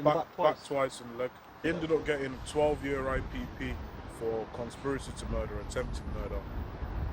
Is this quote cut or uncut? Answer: cut